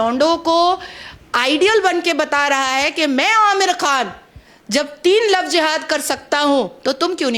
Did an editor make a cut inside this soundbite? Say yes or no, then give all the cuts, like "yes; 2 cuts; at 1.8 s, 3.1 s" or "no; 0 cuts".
no; 0 cuts